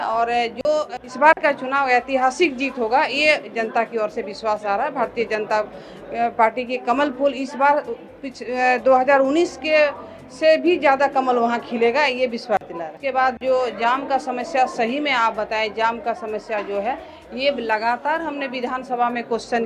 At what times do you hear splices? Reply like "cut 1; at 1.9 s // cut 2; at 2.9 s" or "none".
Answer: cut 1; at 1.0 s // cut 2; at 12.9 s